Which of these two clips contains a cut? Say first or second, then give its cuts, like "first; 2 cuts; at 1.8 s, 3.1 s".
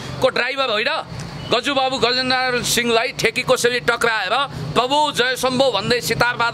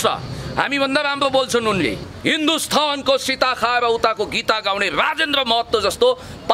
second; 1 cut; at 1.9 s